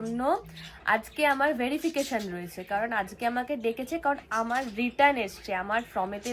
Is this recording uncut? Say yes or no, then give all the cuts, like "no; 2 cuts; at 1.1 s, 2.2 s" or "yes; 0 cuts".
yes; 0 cuts